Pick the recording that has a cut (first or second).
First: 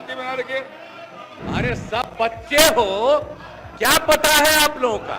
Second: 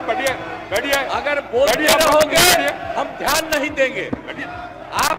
first